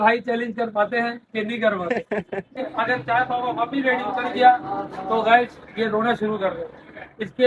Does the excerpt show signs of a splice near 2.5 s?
no; 0 cuts

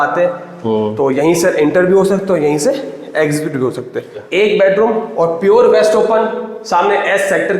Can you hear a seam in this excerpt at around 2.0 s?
no; 1 cut; at 4.2 s

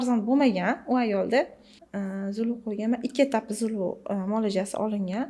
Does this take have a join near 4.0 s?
no; 1 cut; at 1.8 s

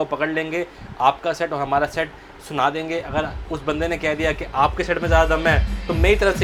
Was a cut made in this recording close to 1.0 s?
no; 0 cuts

